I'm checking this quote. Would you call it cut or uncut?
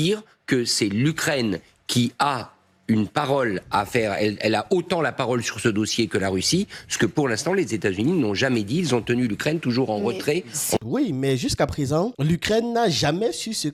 uncut